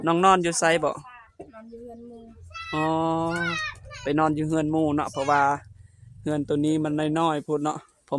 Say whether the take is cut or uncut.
uncut